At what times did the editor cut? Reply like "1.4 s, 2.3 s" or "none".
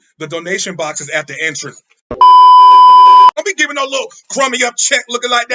3.4 s